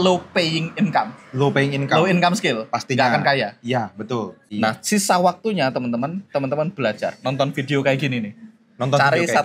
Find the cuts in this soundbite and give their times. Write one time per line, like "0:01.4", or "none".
0:04.4